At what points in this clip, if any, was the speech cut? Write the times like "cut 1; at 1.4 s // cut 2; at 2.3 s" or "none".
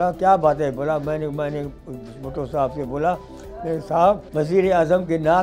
cut 1; at 4.2 s